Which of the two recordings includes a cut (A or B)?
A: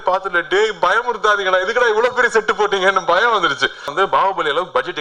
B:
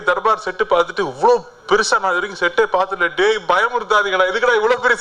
A